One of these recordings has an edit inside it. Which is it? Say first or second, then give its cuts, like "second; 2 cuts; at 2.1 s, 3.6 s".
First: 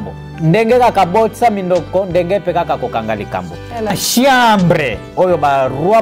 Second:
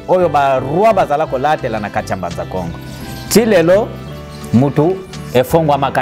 first; 1 cut; at 3.9 s